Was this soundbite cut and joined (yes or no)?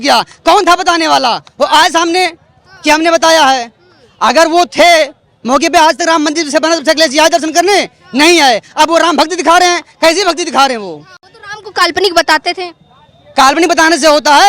no